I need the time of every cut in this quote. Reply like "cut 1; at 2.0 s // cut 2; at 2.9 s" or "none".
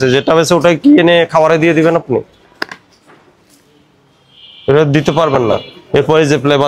none